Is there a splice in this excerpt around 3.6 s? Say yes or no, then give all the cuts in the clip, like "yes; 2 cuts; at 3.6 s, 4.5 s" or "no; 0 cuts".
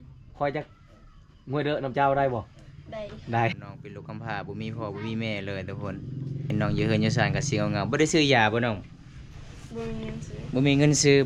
yes; 2 cuts; at 3.6 s, 6.5 s